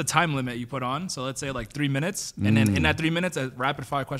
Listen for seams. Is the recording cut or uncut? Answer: uncut